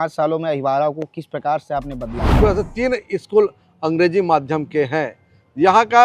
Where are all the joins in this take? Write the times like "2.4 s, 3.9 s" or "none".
2.4 s

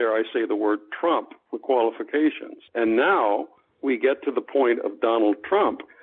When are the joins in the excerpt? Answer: 2.7 s

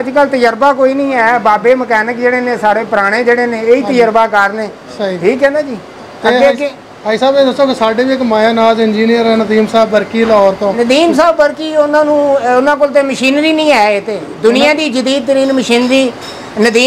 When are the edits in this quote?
none

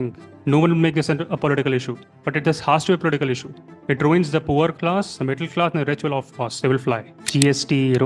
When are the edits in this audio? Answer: 7.1 s

